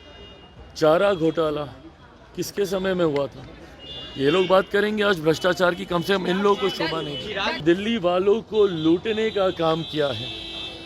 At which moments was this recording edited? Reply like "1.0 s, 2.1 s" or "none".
7.6 s